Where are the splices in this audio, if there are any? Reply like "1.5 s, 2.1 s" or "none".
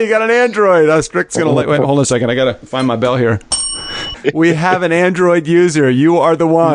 2.6 s, 4.1 s